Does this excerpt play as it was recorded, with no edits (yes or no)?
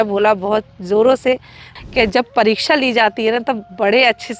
no